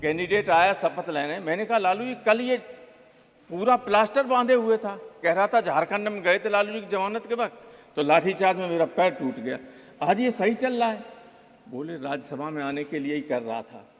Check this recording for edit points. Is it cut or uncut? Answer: uncut